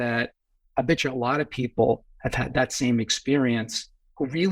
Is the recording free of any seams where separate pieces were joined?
yes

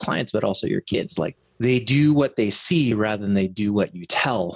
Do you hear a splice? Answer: yes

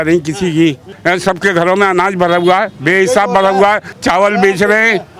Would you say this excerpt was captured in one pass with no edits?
no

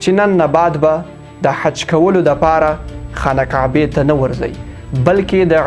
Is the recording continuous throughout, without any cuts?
yes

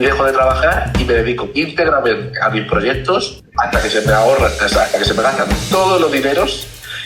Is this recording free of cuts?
no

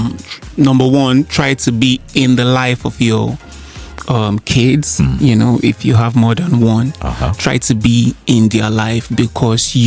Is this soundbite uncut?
yes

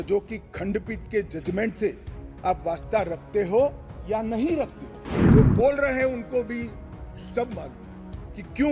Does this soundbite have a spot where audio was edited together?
yes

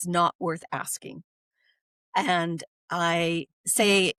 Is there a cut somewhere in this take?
no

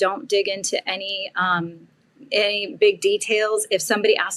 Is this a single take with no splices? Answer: yes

